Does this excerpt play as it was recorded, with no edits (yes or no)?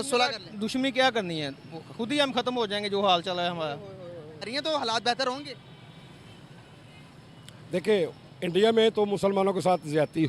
no